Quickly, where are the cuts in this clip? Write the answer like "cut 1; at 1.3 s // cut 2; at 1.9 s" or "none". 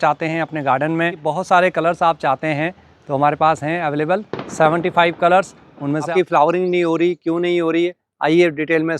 cut 1; at 6.0 s